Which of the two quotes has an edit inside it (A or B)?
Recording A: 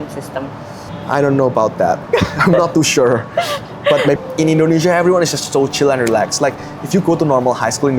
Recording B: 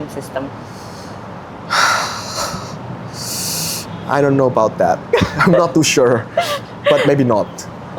A